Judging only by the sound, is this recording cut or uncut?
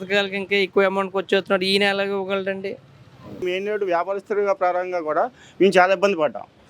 cut